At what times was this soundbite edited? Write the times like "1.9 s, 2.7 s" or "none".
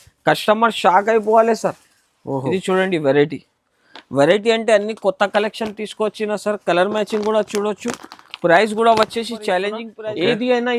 9.9 s